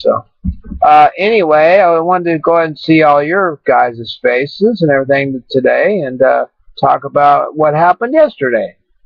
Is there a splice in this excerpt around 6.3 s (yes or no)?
yes